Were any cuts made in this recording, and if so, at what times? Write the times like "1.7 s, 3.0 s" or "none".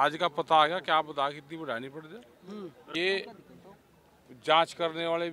2.8 s